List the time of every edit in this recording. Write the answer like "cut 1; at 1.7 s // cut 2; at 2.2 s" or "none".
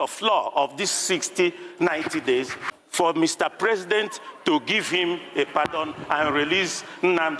cut 1; at 2.5 s